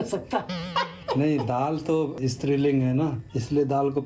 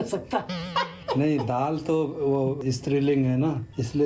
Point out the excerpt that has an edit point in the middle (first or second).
first